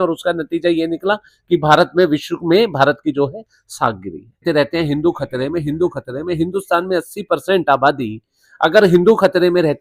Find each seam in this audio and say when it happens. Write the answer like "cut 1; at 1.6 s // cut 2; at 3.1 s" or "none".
cut 1; at 4.4 s